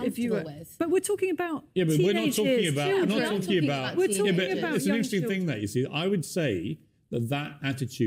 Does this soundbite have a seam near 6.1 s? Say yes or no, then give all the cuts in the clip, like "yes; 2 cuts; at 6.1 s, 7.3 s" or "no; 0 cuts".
yes; 1 cut; at 6.1 s